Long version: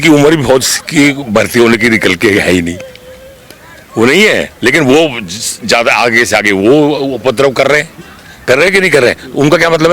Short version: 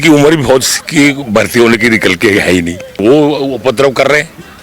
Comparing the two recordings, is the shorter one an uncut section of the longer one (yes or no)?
no